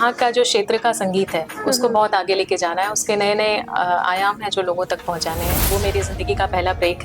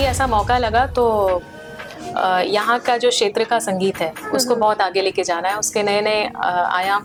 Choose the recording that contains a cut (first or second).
first